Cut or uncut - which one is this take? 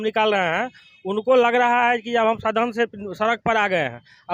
uncut